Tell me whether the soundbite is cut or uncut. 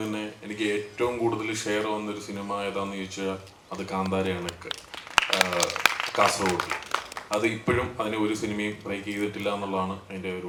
uncut